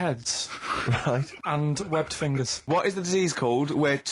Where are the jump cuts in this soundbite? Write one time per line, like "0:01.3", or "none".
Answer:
0:01.3
0:02.7